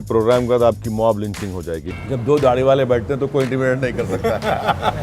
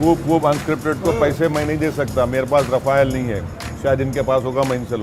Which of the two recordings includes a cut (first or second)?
first